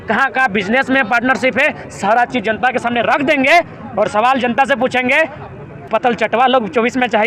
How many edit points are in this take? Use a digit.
1